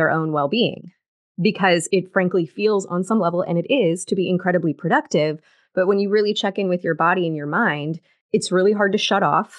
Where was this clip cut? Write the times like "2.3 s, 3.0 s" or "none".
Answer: none